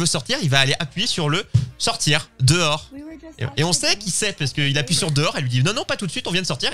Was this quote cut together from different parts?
no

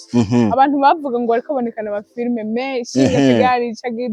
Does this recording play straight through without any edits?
yes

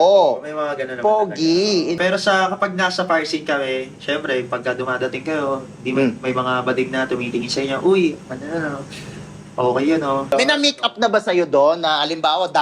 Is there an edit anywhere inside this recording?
yes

